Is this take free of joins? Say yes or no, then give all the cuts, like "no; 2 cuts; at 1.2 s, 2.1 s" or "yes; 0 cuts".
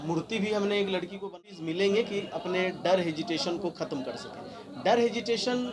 no; 1 cut; at 1.3 s